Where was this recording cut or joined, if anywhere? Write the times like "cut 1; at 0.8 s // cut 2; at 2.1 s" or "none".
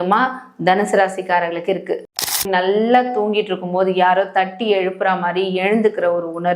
cut 1; at 2.4 s